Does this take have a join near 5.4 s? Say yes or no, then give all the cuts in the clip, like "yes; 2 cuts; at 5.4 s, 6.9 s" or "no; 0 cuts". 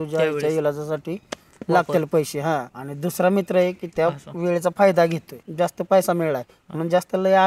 yes; 2 cuts; at 3.8 s, 5.4 s